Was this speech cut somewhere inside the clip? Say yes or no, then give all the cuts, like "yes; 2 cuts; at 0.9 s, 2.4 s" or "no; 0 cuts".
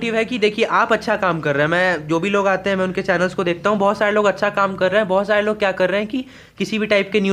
no; 0 cuts